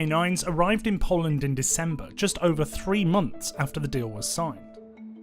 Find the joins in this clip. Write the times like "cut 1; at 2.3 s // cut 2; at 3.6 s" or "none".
none

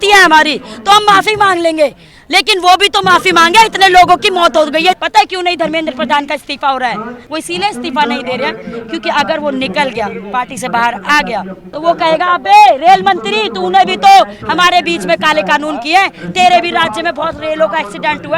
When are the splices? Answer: cut 1; at 5.0 s // cut 2; at 7.1 s // cut 3; at 11.6 s

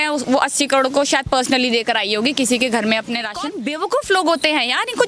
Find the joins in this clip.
cut 1; at 3.3 s

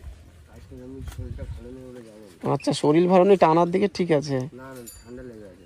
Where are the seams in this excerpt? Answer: none

